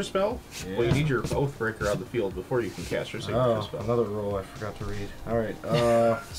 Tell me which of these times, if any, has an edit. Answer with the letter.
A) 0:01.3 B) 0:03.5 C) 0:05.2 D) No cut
D